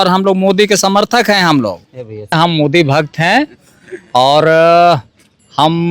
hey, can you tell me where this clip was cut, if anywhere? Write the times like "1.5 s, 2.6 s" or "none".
2.3 s